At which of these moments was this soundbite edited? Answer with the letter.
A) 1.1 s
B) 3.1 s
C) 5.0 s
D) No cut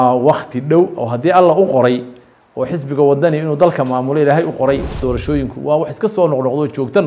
C